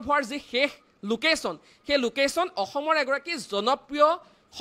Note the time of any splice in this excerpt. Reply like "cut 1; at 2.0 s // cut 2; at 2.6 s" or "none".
none